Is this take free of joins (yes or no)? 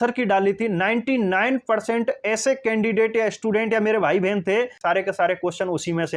no